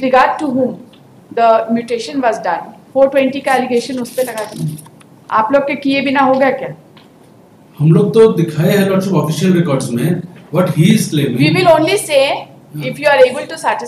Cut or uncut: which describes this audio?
uncut